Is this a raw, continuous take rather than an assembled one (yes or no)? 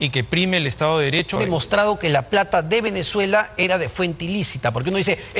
no